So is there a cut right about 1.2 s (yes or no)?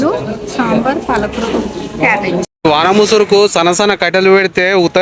no